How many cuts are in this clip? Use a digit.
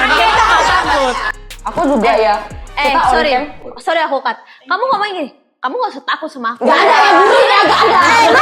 1